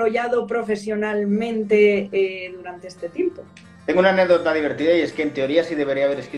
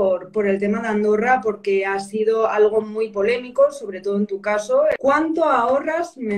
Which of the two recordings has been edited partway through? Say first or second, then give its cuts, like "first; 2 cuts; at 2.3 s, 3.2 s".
second; 1 cut; at 5.0 s